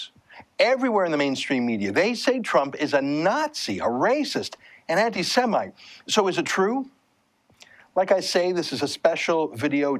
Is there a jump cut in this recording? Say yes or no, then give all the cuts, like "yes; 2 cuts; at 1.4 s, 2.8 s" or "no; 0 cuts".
no; 0 cuts